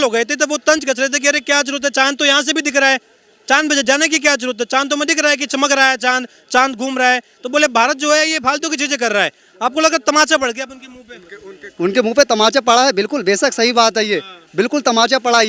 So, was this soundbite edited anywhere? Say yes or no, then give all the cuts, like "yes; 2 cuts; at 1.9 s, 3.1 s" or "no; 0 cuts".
no; 0 cuts